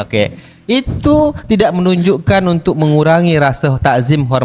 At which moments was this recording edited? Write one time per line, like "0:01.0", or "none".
none